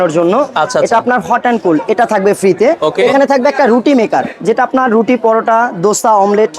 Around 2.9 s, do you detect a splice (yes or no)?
yes